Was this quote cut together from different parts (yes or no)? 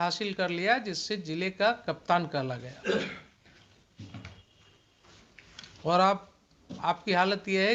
no